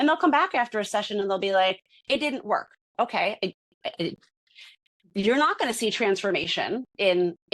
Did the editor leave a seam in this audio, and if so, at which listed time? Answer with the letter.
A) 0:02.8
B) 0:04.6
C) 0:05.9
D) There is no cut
A